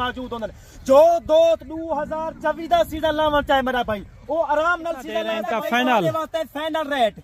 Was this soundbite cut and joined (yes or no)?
yes